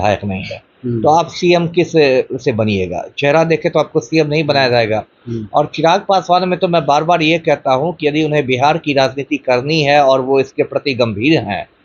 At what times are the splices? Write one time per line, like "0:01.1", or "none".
none